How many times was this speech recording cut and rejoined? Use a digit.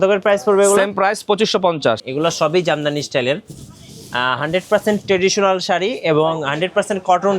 1